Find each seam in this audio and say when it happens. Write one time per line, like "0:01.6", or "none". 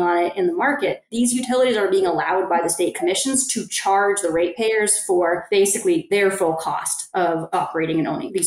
0:05.8
0:07.3